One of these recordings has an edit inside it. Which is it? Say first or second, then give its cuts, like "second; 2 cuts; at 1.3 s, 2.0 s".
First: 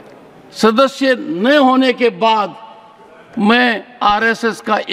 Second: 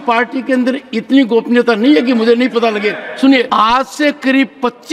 second; 1 cut; at 3.5 s